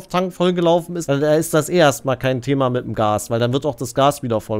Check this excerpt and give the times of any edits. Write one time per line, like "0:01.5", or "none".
0:00.9

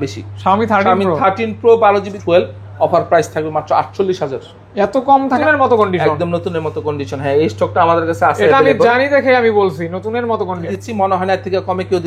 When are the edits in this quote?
0:02.2
0:05.4
0:10.7

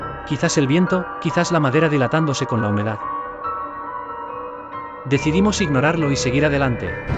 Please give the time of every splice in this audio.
0:03.0
0:05.0

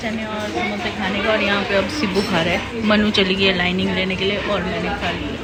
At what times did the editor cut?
none

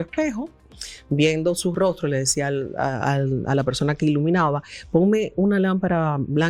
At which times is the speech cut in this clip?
none

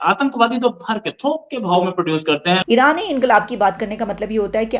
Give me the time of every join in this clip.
0:02.6

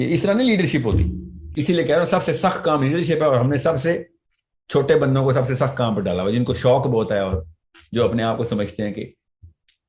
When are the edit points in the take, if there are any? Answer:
0:01.5

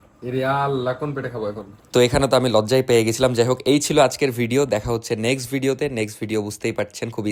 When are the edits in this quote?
none

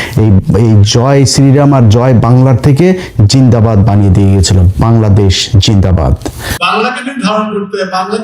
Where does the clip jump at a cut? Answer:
0:06.5

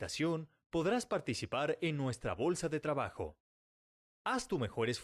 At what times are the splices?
none

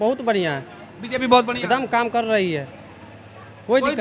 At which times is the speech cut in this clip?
none

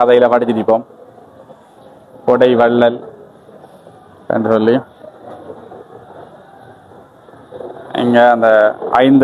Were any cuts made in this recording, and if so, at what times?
none

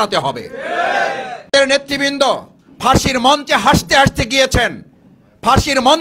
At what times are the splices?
0:01.5

